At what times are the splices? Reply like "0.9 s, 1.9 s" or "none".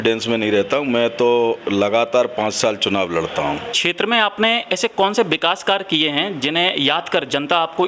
3.8 s